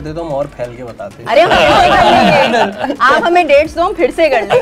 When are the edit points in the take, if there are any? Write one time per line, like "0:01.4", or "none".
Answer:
none